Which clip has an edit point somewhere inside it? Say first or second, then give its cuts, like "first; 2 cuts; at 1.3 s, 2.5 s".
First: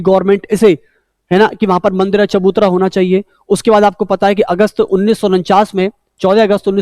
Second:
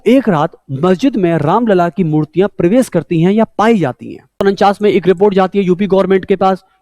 second; 1 cut; at 4.4 s